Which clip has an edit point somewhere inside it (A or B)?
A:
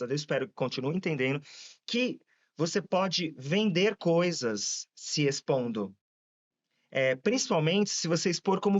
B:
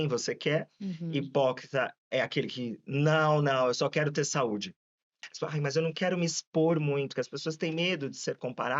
B